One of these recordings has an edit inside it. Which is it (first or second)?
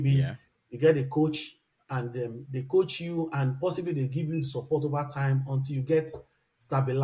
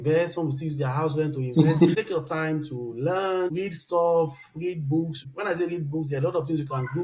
second